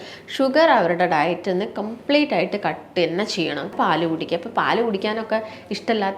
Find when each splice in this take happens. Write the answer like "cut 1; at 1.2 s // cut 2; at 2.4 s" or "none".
cut 1; at 3.7 s